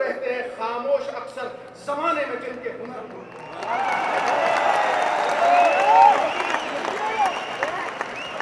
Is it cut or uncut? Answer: uncut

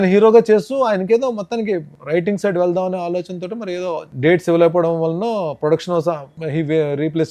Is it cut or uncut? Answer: uncut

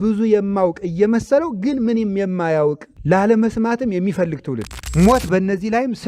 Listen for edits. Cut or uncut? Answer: cut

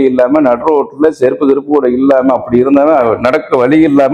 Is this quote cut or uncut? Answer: uncut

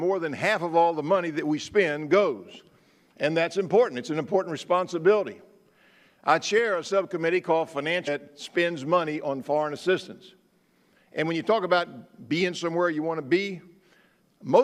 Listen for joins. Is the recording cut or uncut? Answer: uncut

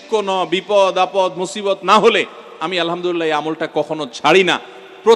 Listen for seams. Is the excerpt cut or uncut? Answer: uncut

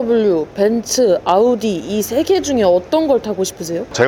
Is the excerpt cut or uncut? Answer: uncut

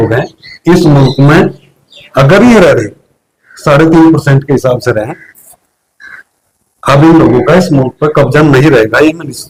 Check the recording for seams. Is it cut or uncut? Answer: uncut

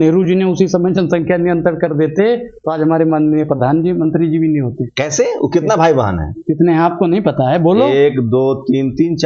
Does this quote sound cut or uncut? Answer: uncut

